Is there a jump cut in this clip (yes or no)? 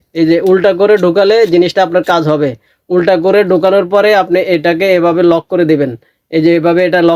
no